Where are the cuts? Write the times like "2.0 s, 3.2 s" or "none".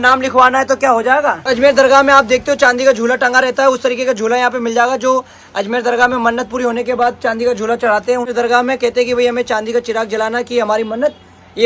1.5 s, 8.3 s